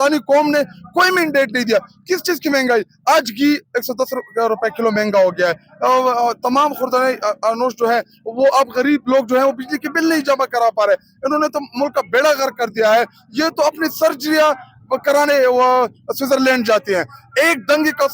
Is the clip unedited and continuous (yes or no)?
yes